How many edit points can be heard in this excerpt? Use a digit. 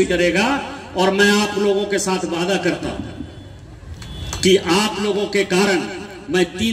0